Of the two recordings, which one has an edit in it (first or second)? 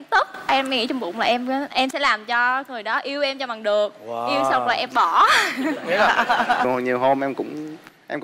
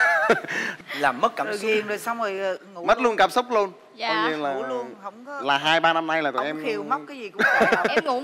first